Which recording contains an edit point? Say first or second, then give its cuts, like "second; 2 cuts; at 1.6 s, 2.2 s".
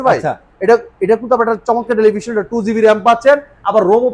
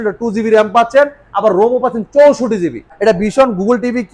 second; 1 cut; at 2.8 s